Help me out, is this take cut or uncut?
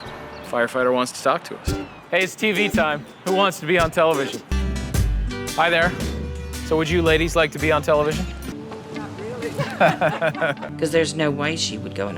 cut